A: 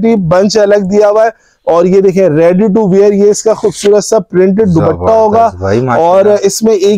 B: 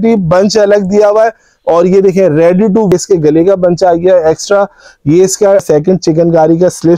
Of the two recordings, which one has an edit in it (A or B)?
B